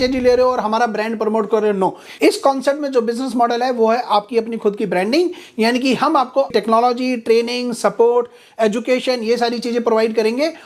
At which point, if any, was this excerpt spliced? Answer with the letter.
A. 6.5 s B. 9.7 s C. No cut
A